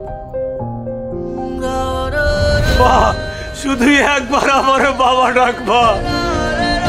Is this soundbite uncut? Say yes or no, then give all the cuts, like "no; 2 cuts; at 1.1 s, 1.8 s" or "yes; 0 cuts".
yes; 0 cuts